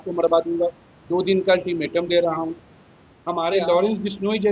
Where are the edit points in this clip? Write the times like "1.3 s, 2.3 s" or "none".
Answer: 3.5 s

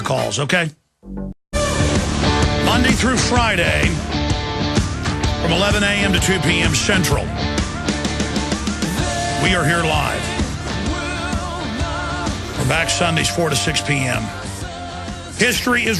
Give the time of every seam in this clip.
8.6 s

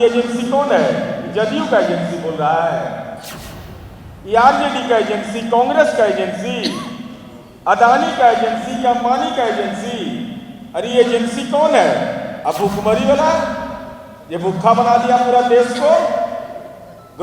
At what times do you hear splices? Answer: 12.3 s

